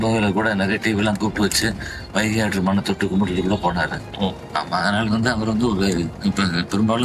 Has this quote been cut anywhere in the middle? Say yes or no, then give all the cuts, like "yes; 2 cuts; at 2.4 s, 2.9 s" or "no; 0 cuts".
yes; 1 cut; at 6.1 s